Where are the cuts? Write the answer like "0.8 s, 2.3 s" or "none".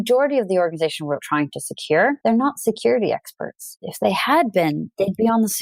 2.2 s, 3.7 s